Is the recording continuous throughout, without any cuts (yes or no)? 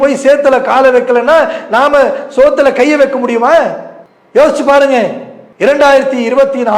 no